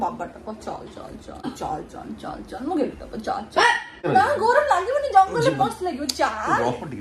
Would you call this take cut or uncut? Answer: cut